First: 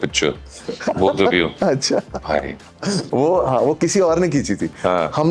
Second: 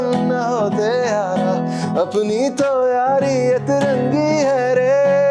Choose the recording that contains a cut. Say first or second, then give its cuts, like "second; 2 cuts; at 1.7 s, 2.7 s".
first; 1 cut; at 3.0 s